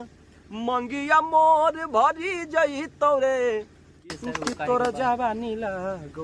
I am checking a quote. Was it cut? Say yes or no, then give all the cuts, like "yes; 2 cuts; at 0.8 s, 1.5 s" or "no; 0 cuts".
yes; 1 cut; at 4.1 s